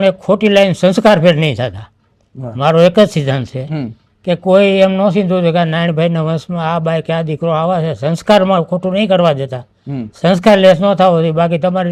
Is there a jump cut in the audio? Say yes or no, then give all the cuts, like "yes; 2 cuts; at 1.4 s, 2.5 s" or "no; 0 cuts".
no; 0 cuts